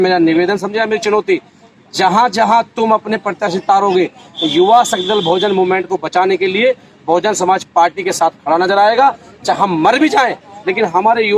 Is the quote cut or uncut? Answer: uncut